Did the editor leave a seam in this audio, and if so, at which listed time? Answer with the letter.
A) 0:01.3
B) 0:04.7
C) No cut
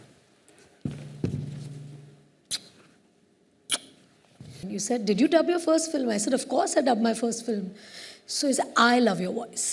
B